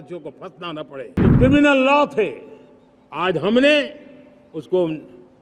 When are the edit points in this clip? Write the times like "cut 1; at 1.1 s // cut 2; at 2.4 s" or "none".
cut 1; at 1.2 s